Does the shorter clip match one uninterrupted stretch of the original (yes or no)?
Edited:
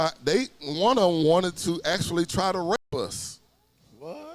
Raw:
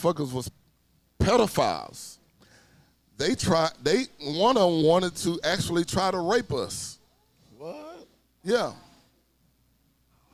yes